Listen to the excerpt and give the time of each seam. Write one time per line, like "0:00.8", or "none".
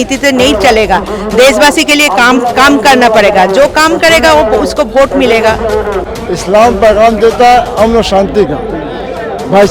0:06.1